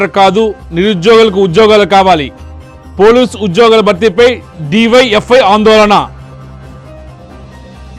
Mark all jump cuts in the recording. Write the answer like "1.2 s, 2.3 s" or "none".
6.5 s